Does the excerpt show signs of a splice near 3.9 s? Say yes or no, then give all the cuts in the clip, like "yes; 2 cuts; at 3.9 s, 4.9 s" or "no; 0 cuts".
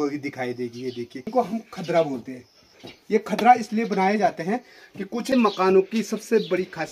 no; 2 cuts; at 1.2 s, 5.3 s